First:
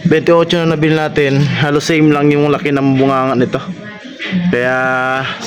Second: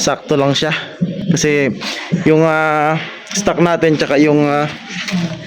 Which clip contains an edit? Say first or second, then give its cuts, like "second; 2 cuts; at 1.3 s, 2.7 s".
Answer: second; 1 cut; at 1.2 s